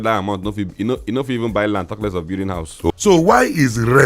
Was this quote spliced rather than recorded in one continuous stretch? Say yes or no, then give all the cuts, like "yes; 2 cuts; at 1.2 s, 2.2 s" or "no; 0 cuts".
yes; 1 cut; at 2.9 s